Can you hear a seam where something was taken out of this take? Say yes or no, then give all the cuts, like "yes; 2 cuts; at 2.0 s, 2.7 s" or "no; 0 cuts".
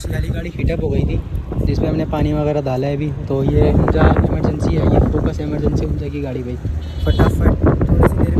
no; 0 cuts